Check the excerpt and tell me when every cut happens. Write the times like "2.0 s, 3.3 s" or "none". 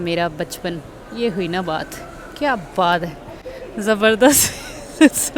none